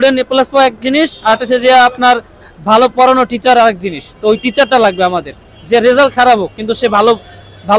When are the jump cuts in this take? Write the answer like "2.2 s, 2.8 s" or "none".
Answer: none